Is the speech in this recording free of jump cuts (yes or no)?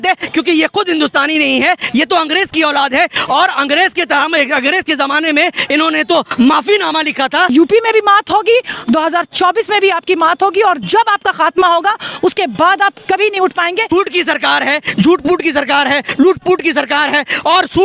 no